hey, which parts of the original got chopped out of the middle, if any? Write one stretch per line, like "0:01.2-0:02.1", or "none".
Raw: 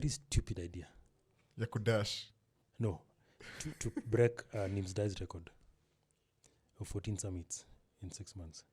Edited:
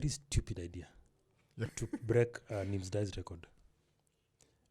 0:01.7-0:03.7